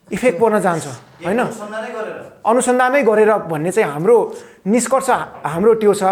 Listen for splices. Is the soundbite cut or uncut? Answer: uncut